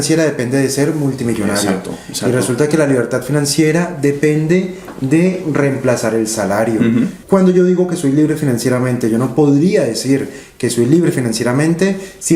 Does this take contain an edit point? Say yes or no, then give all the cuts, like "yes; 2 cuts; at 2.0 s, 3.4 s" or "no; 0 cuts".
yes; 1 cut; at 7.2 s